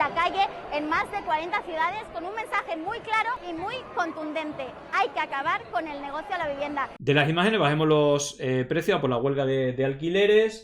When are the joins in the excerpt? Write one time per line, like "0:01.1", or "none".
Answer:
0:07.0